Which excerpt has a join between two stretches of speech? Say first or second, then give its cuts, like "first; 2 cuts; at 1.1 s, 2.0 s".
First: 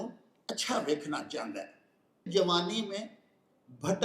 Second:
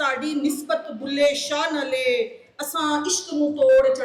first; 1 cut; at 2.3 s